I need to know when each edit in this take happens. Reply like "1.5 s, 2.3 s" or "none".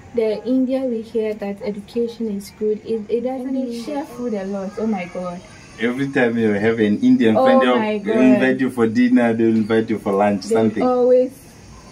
3.8 s

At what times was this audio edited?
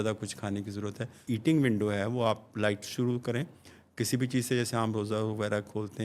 1.2 s

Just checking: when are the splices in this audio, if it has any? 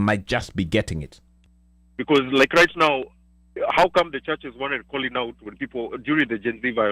1.4 s

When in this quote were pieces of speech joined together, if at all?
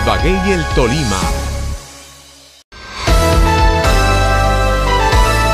2.5 s

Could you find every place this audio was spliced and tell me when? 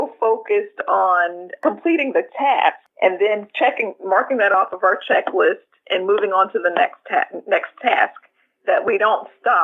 1.4 s, 2.9 s

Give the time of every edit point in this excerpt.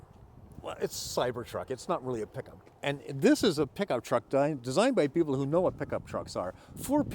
2.6 s

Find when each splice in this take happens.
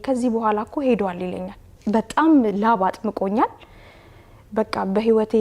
1.7 s

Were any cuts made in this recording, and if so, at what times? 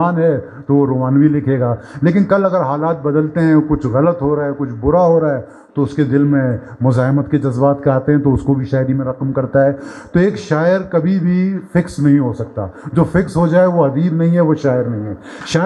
none

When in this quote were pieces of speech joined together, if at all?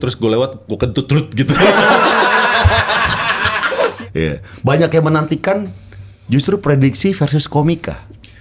3.8 s

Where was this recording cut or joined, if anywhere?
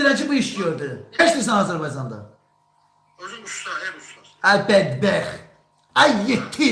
1.2 s

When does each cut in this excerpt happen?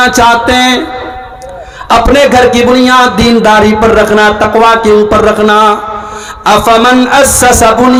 none

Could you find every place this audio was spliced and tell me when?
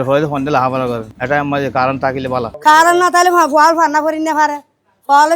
1.1 s, 2.5 s

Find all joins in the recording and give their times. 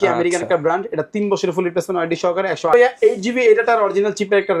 2.7 s

